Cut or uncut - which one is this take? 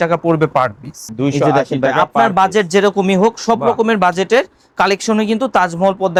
uncut